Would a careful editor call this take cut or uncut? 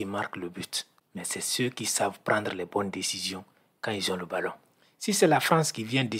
cut